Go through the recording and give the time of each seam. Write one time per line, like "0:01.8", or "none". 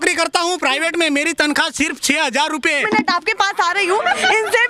0:02.8